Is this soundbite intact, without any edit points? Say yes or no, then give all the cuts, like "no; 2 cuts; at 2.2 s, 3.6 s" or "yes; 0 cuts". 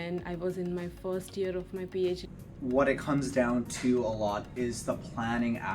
no; 1 cut; at 2.3 s